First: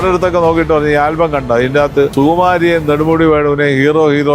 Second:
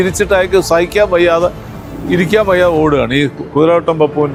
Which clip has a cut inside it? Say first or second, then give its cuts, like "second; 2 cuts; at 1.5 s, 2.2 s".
first; 1 cut; at 2.1 s